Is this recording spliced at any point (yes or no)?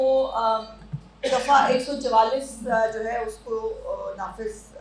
no